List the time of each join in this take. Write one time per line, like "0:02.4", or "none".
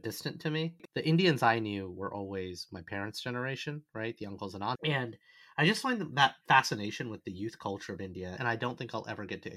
0:00.8
0:04.8
0:08.4

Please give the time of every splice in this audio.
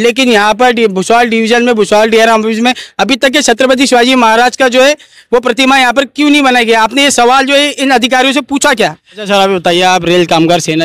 0:09.1

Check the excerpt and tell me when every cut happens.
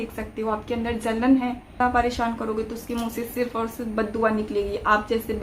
0:01.8

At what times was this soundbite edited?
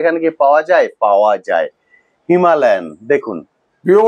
none

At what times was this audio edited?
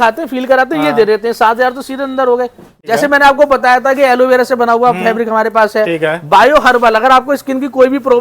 0:02.7

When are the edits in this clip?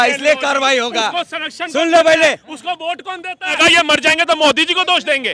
0:03.5

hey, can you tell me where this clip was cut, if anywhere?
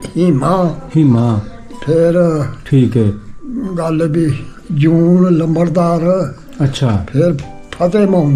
none

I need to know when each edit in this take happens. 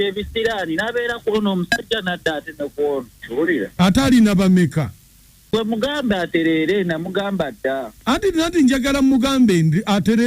0:05.5

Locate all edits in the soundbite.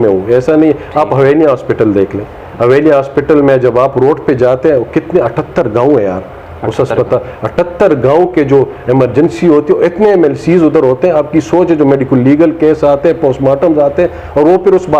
none

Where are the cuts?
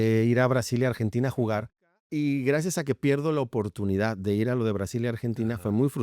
0:02.0

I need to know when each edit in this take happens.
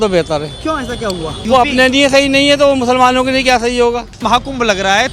0:01.3
0:04.2

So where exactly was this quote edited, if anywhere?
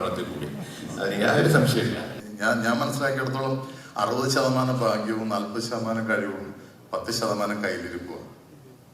0:02.1

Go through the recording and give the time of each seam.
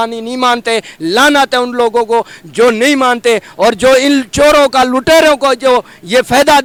none

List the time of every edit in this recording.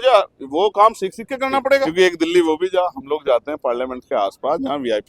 0:01.9

